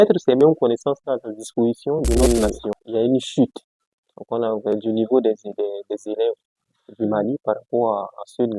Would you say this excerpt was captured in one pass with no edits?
no; 1 cut; at 2.2 s

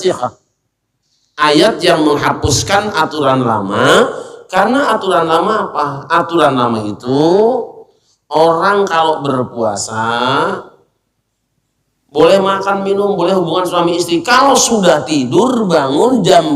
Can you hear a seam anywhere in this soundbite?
no; 0 cuts

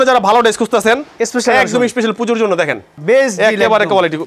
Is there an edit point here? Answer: yes; 1 cut; at 3.0 s

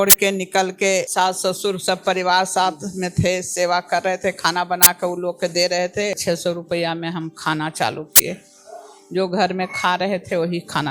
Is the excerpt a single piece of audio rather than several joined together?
no; 2 cuts; at 1.1 s, 6.2 s

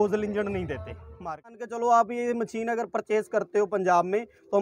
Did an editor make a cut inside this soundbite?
yes; 1 cut; at 1.6 s

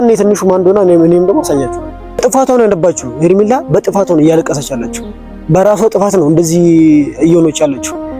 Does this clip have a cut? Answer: yes; 1 cut; at 2.2 s

